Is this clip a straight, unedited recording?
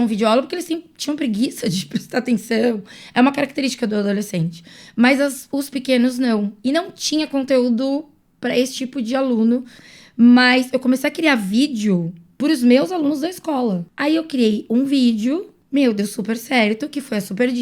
no; 3 cuts; at 9.8 s, 13.9 s, 15.5 s

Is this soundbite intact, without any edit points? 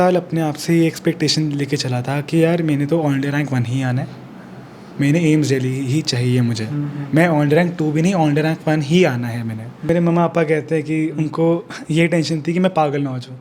no; 1 cut; at 9.8 s

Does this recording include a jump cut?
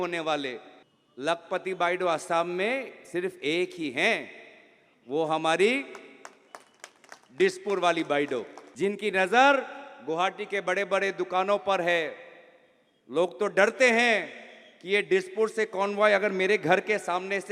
no; 0 cuts

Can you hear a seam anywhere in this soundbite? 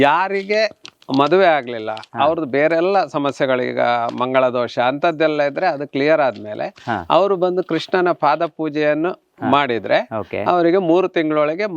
no; 0 cuts

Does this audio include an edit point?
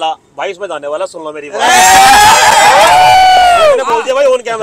no; 0 cuts

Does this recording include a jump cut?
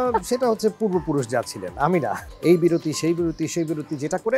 yes; 1 cut; at 2.3 s

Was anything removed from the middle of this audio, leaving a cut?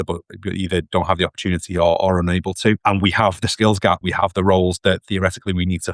yes; 2 cuts; at 2.8 s, 4.0 s

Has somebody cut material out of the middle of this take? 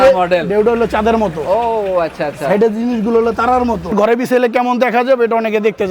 yes; 1 cut; at 3.9 s

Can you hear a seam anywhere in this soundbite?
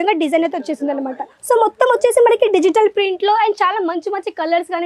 yes; 1 cut; at 1.3 s

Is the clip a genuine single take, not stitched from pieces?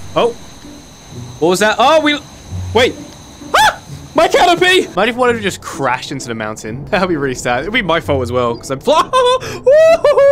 no; 2 cuts; at 4.9 s, 6.7 s

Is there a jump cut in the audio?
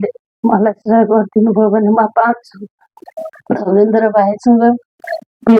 yes; 1 cut; at 3.4 s

